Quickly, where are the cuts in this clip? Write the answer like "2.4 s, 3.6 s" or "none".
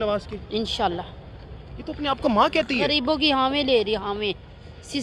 none